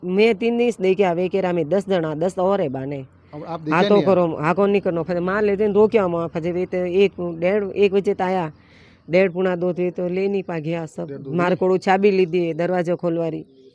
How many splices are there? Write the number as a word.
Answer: zero